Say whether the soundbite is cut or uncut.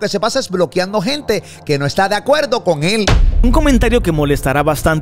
cut